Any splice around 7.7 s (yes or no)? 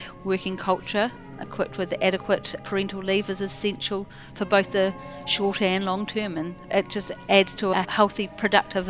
yes